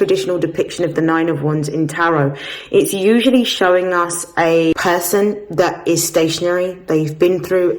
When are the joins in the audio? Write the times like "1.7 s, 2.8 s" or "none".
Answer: 4.7 s